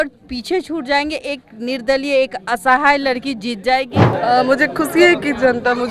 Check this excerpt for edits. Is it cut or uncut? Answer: cut